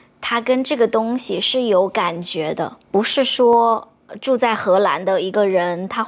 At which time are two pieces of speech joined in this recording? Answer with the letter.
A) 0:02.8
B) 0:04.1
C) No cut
A